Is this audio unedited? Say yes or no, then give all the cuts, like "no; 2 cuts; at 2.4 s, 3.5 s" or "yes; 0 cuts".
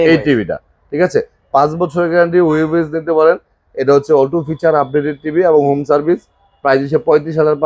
yes; 0 cuts